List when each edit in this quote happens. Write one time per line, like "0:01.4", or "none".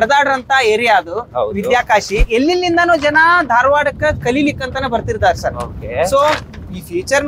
0:02.2